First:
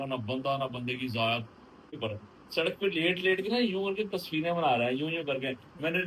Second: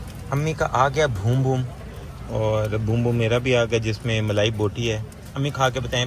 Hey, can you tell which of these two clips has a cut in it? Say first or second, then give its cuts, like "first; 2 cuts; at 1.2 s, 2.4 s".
first; 1 cut; at 1.9 s